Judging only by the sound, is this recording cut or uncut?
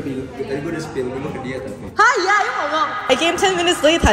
cut